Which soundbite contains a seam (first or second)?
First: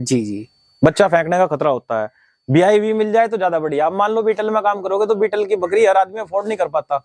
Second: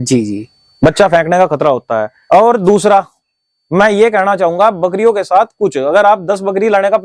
second